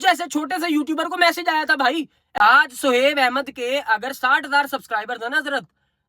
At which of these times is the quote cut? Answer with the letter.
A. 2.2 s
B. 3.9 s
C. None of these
A